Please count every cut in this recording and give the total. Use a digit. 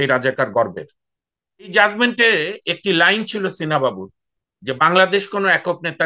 1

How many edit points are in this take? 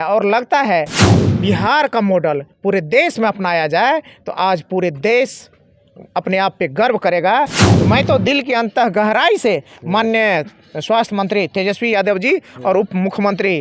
2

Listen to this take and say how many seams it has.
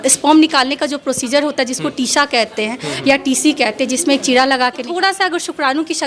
1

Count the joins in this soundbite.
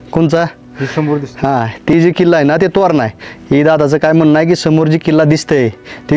1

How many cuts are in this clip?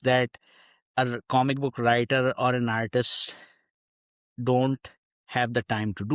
0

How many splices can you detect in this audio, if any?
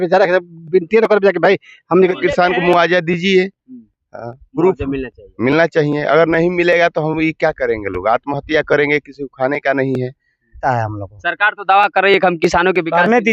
2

